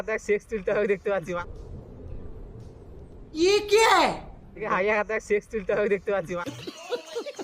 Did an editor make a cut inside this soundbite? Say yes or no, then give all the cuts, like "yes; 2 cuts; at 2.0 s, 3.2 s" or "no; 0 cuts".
yes; 3 cuts; at 1.2 s, 4.7 s, 6.2 s